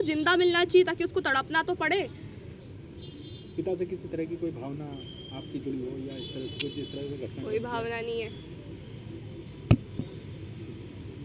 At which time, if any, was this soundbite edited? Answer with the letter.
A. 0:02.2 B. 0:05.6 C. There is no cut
C